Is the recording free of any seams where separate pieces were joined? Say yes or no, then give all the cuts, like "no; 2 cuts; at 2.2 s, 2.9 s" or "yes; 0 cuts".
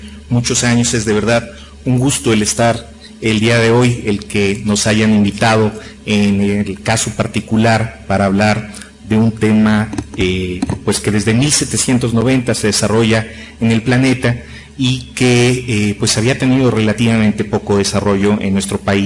yes; 0 cuts